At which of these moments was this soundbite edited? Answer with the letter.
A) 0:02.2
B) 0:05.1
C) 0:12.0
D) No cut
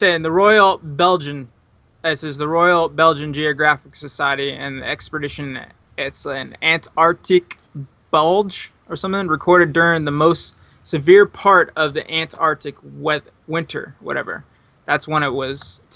A